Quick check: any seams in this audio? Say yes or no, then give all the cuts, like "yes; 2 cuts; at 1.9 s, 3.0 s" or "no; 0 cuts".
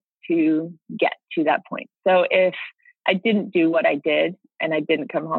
no; 0 cuts